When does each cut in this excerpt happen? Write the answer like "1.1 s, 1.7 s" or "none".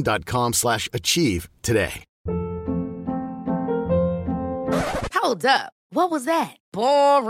2.1 s